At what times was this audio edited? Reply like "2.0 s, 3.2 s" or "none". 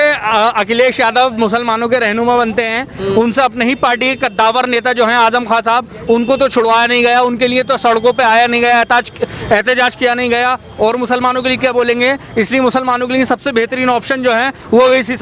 none